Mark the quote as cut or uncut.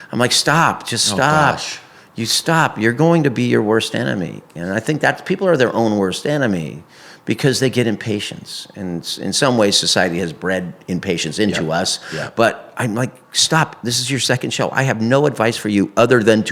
uncut